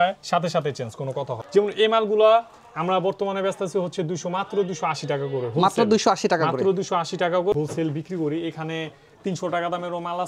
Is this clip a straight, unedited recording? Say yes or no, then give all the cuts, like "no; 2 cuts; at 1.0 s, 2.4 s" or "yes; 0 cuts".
no; 2 cuts; at 1.3 s, 7.5 s